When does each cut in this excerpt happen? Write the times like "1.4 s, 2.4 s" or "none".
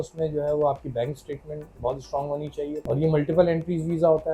2.8 s